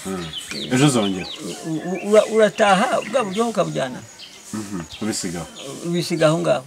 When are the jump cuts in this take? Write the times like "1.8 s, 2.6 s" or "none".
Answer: none